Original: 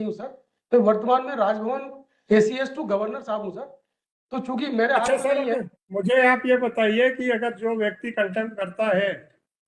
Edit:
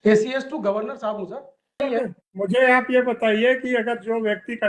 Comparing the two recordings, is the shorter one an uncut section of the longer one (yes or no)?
no